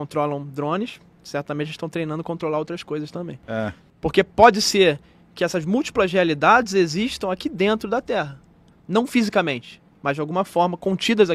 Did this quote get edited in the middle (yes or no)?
yes